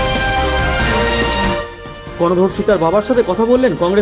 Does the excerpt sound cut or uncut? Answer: cut